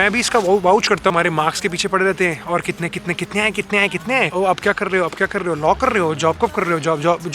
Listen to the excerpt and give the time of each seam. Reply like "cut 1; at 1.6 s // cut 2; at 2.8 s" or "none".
cut 1; at 1.1 s // cut 2; at 4.3 s